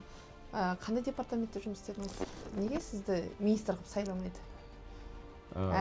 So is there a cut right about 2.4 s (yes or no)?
yes